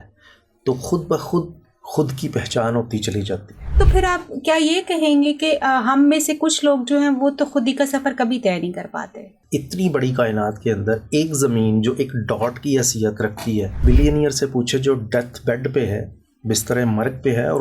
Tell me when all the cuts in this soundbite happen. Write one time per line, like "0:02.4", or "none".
0:03.7
0:09.4
0:13.8